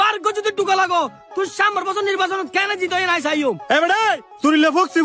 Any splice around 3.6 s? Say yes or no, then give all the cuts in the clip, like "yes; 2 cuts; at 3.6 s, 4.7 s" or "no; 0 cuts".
yes; 1 cut; at 3.6 s